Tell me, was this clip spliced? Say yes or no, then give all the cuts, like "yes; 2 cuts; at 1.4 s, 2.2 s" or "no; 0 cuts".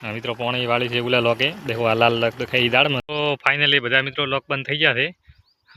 yes; 1 cut; at 3.0 s